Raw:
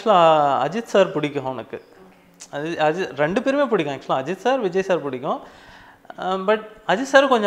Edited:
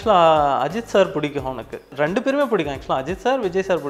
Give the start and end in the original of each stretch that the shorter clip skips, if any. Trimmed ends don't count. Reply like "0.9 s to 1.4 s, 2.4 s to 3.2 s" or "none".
1.9 s to 3.1 s